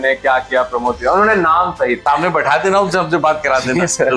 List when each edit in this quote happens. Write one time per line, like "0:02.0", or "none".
0:02.0